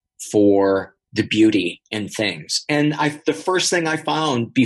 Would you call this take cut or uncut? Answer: uncut